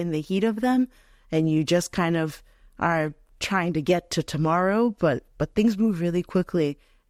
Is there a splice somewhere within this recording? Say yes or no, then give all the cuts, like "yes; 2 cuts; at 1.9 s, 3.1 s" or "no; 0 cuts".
no; 0 cuts